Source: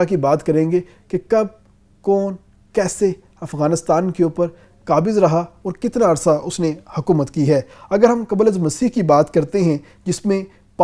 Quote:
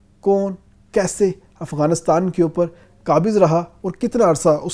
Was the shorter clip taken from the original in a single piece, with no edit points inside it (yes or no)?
yes